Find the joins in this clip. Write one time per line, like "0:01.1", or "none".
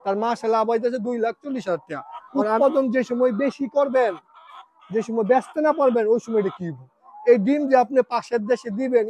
0:02.6